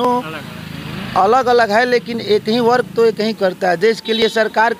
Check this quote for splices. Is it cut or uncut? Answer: uncut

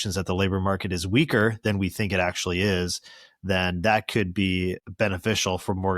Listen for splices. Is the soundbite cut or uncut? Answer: cut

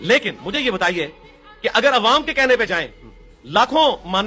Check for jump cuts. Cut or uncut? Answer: uncut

